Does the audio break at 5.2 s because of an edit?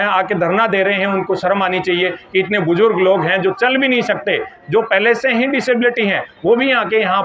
no; 0 cuts

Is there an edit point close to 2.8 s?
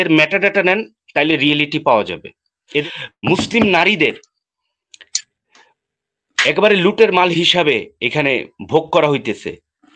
yes; 1 cut; at 2.8 s

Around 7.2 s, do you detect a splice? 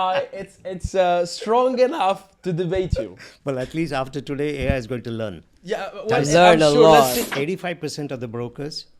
yes; 1 cut; at 7.2 s

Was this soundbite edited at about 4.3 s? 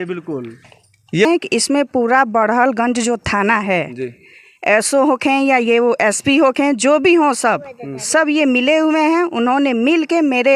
no; 1 cut; at 1.2 s

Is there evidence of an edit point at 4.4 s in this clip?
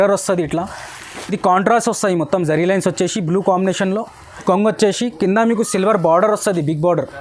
yes; 1 cut; at 4.4 s

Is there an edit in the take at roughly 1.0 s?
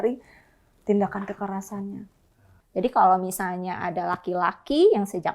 no; 1 cut; at 2.5 s

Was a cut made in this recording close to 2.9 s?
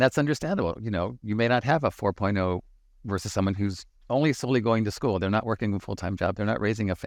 no; 0 cuts

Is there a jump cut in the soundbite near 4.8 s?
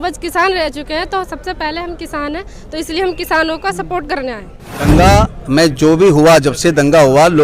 yes; 1 cut; at 4.8 s

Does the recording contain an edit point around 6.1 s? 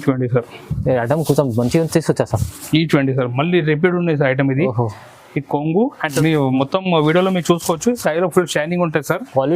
yes; 1 cut; at 6.1 s

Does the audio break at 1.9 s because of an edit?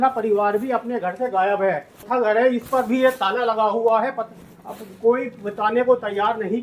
yes; 1 cut; at 1.9 s

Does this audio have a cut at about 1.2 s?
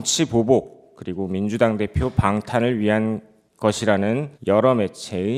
no; 0 cuts

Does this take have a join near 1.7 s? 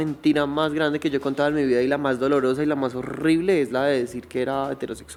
no; 0 cuts

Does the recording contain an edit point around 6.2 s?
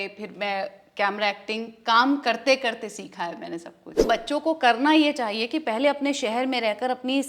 no; 1 cut; at 4.1 s

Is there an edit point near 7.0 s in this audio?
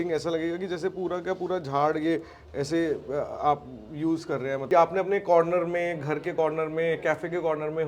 no; 1 cut; at 4.6 s

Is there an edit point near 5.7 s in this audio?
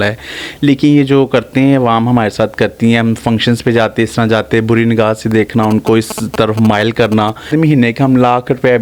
no; 1 cut; at 7.5 s

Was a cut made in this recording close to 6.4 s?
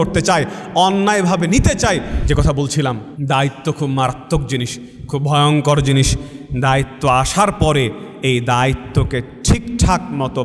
no; 2 cuts; at 2.1 s, 3.1 s

